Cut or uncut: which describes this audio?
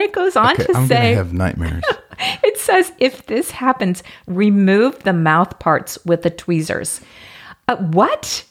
uncut